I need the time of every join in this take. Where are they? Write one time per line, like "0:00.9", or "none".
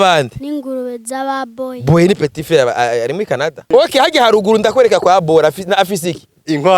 0:03.7